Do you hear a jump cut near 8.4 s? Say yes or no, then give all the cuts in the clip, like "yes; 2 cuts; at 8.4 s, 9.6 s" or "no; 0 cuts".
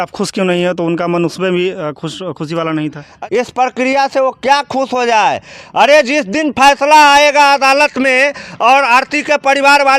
no; 1 cut; at 3.1 s